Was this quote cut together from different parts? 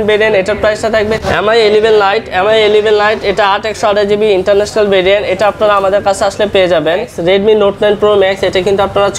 yes; 2 cuts; at 1.2 s, 7.1 s

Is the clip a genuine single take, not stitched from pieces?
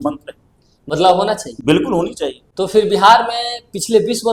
yes; 0 cuts

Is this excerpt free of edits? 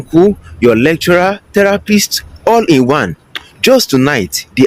yes; 0 cuts

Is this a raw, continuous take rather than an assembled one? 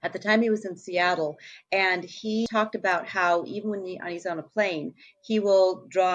no; 1 cut; at 2.5 s

